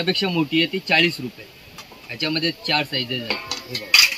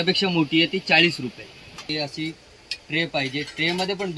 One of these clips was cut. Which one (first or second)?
second